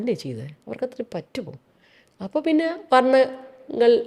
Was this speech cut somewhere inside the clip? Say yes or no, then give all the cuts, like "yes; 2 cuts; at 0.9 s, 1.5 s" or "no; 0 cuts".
no; 0 cuts